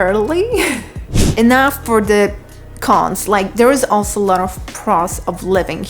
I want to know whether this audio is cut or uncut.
cut